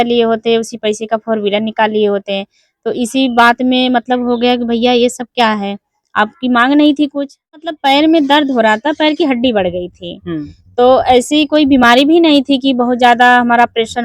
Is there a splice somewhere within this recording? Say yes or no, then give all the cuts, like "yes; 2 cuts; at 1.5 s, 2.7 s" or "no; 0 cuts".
yes; 1 cut; at 7.7 s